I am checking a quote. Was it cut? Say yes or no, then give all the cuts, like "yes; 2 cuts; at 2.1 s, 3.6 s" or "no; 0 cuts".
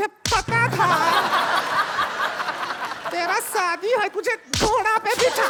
no; 0 cuts